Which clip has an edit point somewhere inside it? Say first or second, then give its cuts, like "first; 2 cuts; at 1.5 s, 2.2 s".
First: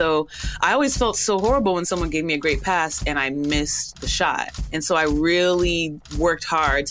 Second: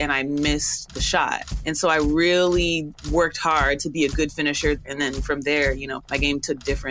second; 2 cuts; at 4.8 s, 6.0 s